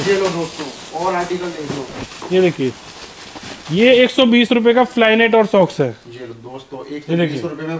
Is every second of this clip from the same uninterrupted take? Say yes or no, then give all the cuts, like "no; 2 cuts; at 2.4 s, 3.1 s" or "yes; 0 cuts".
yes; 0 cuts